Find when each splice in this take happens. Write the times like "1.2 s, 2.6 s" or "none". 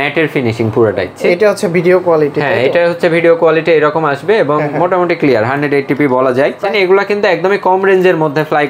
1.1 s, 6.6 s